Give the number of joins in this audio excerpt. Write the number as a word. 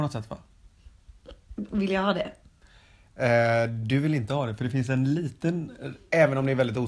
zero